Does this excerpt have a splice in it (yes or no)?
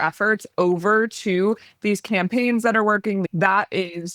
yes